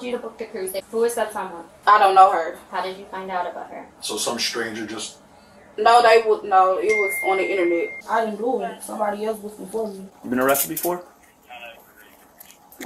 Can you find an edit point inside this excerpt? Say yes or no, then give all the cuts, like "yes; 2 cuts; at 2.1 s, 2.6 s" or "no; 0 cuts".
yes; 3 cuts; at 0.8 s, 8.0 s, 10.1 s